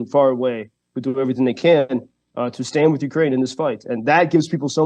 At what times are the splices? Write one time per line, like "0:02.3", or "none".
none